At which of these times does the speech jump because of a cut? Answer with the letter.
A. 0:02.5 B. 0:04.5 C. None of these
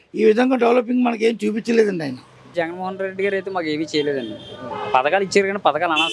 A